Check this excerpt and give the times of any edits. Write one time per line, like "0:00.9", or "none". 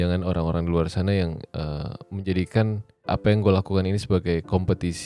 0:03.1